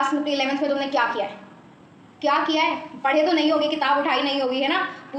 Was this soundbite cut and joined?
no; 0 cuts

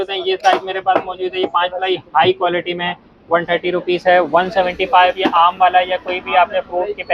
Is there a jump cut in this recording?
no; 0 cuts

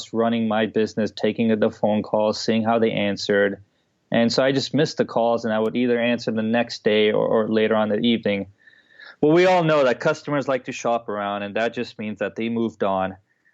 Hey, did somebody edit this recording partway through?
no; 0 cuts

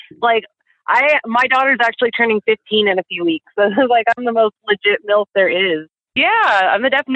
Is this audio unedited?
no; 1 cut; at 5.9 s

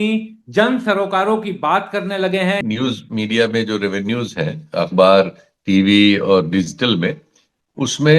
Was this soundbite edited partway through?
yes; 1 cut; at 2.6 s

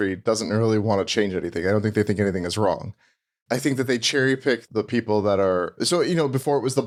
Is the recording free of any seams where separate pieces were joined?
yes; 0 cuts

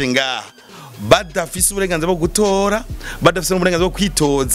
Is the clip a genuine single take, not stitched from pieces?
yes; 0 cuts

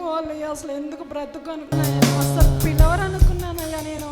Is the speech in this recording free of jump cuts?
no; 1 cut; at 1.7 s

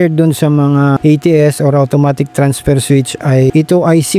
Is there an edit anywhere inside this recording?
yes; 2 cuts; at 1.0 s, 3.5 s

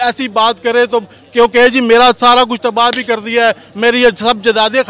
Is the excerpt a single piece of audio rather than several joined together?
yes; 0 cuts

